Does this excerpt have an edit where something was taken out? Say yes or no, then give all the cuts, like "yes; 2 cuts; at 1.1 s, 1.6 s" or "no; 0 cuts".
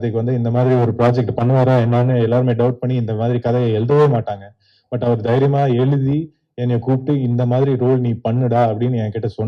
no; 0 cuts